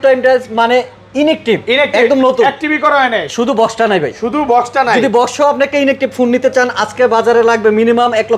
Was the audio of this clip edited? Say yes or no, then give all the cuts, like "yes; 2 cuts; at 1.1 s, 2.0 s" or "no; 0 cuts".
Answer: no; 0 cuts